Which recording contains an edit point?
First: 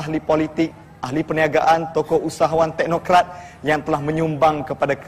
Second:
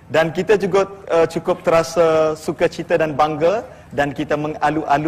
first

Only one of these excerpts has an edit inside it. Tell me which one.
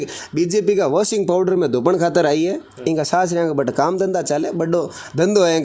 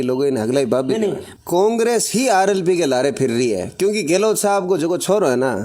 second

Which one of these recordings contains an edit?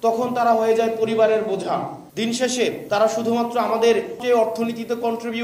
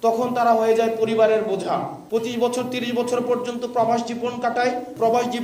first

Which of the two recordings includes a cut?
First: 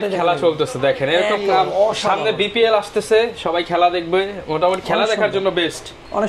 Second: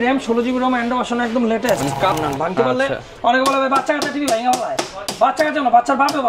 second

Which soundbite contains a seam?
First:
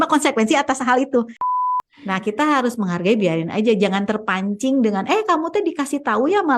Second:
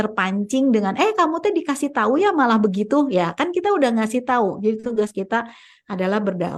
first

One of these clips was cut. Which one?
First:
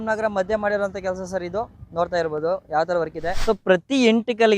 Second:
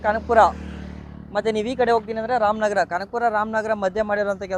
first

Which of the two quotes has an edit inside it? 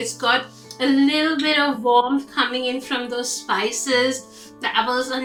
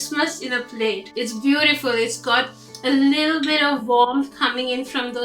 second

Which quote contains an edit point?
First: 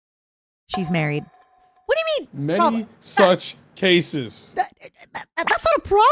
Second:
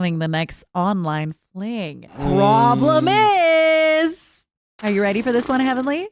second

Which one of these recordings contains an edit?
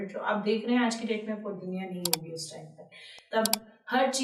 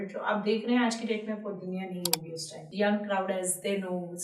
second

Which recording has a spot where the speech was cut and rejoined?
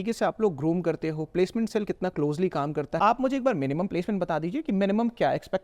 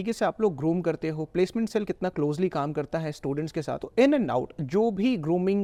first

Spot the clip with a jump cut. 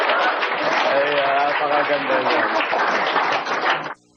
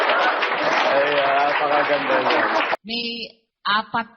second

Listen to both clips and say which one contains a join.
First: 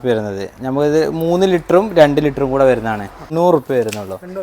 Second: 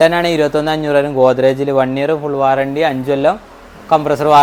first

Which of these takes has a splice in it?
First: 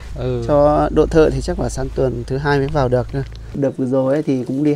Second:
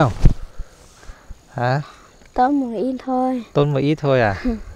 first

